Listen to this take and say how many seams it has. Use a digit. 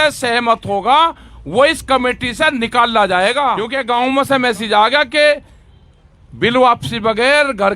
1